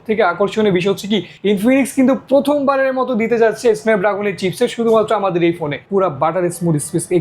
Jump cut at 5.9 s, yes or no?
yes